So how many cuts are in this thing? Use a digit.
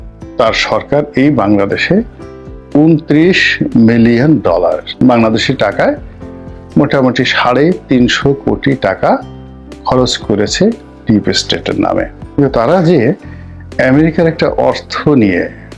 2